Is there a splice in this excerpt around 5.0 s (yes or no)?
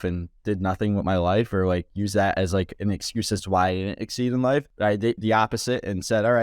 yes